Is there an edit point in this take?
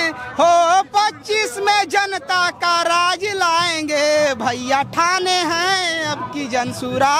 no; 0 cuts

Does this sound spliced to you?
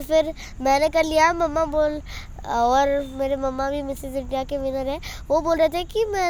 no; 0 cuts

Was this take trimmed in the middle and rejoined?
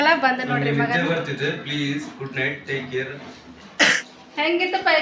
yes; 1 cut; at 4.0 s

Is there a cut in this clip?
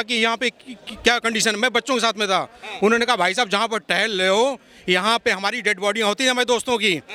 no; 0 cuts

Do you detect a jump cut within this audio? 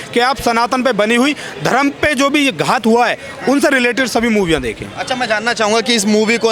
no; 0 cuts

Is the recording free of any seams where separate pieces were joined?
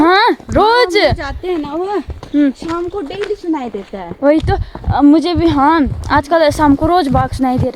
yes; 0 cuts

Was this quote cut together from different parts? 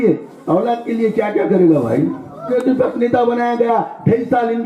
yes; 1 cut; at 2.5 s

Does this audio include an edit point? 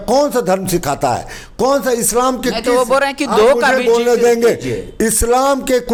no; 0 cuts

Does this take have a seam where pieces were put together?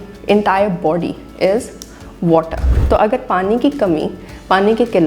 yes; 1 cut; at 2.7 s

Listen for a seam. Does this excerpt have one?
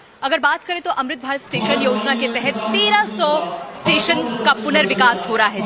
yes; 1 cut; at 2.8 s

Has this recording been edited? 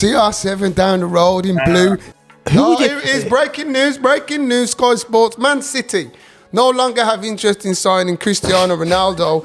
yes; 1 cut; at 2.1 s

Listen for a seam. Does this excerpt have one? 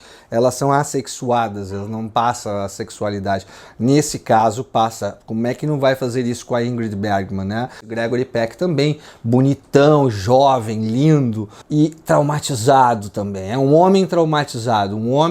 yes; 1 cut; at 7.9 s

